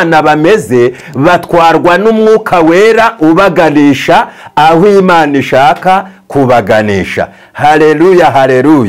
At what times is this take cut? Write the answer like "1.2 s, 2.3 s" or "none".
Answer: none